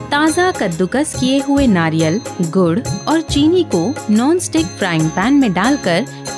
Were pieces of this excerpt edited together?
no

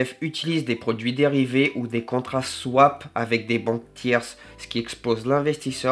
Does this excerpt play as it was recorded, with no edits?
yes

